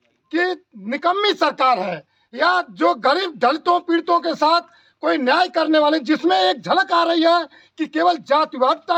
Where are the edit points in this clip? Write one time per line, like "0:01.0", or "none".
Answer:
none